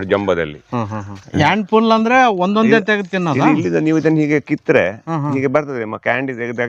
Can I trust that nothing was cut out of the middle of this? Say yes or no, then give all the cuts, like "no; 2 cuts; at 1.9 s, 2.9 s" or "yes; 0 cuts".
no; 1 cut; at 1.2 s